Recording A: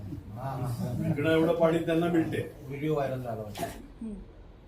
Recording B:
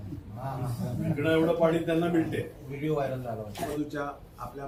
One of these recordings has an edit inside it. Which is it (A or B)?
A